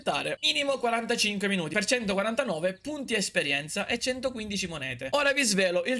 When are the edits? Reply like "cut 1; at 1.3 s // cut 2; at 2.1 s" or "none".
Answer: none